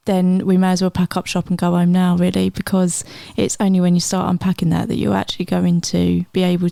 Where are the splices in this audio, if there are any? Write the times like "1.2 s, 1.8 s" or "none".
none